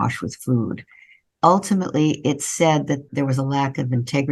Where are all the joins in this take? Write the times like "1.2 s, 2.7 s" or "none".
1.2 s, 3.1 s

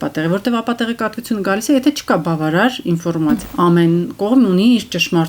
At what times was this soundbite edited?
3.5 s

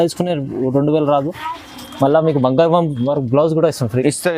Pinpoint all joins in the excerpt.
none

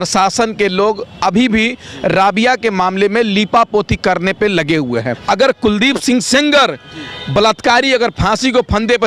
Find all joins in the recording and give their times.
5.1 s

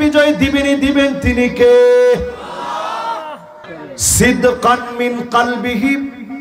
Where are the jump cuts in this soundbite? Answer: 3.7 s

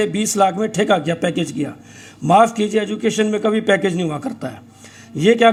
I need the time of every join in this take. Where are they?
none

